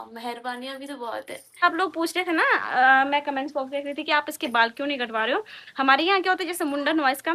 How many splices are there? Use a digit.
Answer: 1